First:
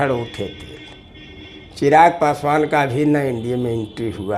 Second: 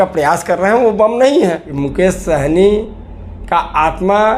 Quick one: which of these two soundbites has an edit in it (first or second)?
second